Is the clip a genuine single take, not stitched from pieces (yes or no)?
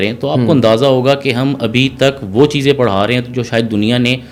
yes